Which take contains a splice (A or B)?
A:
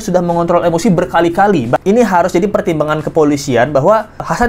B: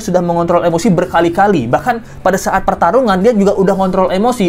A